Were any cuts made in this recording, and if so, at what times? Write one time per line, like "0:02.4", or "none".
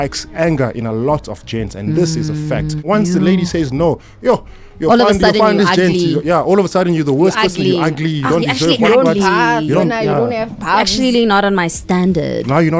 0:02.8